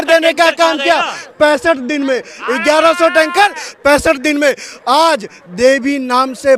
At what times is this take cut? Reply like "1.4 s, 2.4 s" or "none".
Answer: none